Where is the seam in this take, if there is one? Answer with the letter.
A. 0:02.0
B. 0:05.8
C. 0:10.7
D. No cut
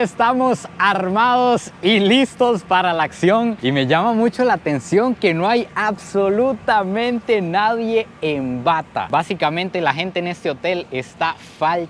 D